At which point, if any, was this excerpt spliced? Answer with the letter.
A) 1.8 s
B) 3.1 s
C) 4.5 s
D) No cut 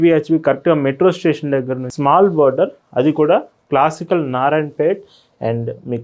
A